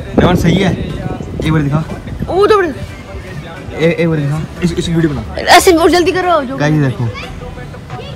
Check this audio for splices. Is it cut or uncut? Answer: cut